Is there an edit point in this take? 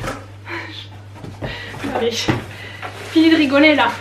no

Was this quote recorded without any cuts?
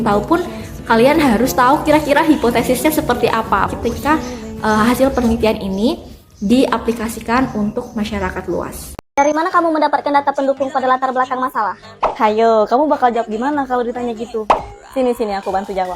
no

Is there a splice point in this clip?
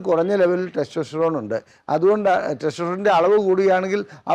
no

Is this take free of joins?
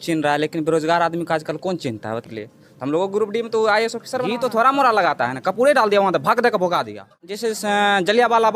no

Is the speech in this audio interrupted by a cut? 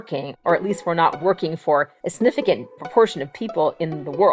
yes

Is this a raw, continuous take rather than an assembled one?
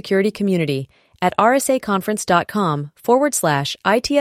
yes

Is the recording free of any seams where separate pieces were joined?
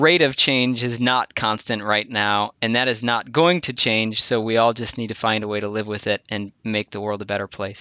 yes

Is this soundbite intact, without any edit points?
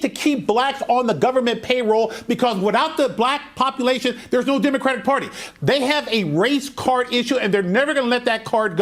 yes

